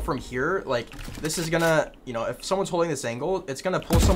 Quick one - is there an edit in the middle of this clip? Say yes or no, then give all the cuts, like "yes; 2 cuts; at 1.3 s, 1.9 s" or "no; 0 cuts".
no; 0 cuts